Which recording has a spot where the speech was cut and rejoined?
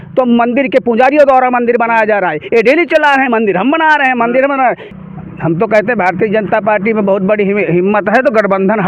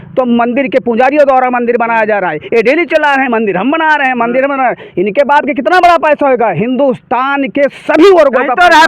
first; 1 cut; at 4.8 s

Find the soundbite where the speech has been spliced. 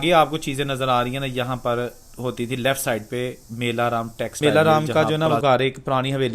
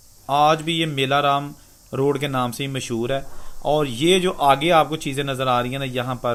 first; 1 cut; at 4.4 s

